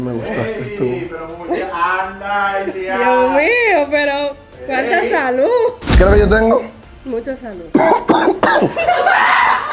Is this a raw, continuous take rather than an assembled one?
no; 1 cut; at 5.8 s

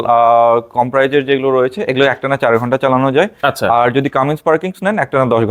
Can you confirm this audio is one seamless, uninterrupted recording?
yes; 0 cuts

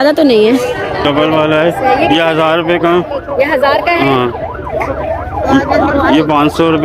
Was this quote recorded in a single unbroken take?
no; 1 cut; at 1.0 s

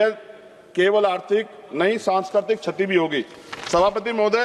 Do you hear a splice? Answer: no; 0 cuts

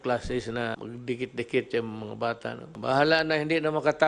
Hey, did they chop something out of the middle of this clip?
yes; 2 cuts; at 0.8 s, 2.7 s

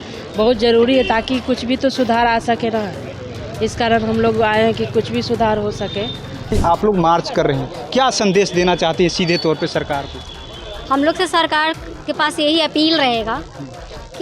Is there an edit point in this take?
yes; 1 cut; at 6.5 s

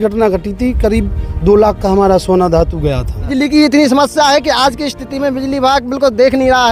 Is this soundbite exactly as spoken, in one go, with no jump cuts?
no; 1 cut; at 3.3 s

